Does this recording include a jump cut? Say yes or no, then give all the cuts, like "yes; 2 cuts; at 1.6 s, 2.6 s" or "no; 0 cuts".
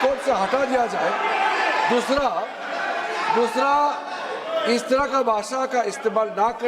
no; 0 cuts